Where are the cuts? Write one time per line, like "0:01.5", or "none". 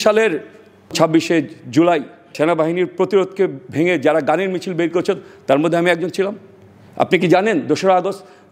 0:00.9
0:02.3